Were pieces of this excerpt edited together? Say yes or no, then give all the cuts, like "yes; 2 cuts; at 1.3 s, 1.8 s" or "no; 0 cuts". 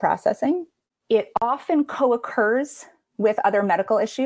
no; 0 cuts